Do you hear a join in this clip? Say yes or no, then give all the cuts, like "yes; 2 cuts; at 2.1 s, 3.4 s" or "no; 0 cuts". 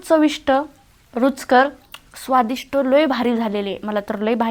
no; 0 cuts